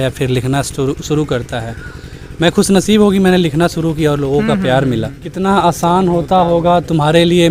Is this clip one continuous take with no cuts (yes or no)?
no